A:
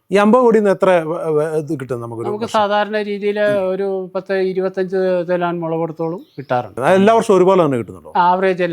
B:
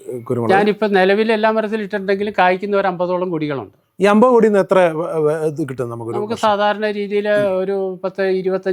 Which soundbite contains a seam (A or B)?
A